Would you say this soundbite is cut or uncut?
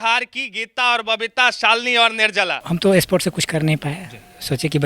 cut